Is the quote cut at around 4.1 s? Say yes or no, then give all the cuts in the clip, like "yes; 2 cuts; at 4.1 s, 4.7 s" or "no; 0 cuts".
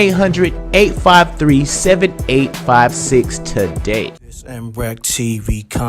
yes; 1 cut; at 4.1 s